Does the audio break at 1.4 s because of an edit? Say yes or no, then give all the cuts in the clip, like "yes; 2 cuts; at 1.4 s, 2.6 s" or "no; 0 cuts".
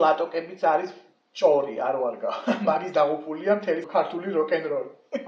no; 1 cut; at 3.8 s